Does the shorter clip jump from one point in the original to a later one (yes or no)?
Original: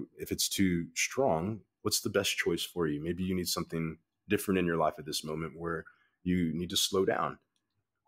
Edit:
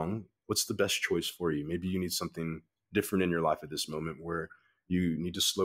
no